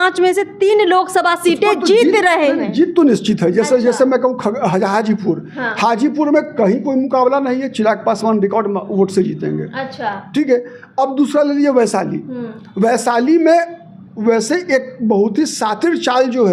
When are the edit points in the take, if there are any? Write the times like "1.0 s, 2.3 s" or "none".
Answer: none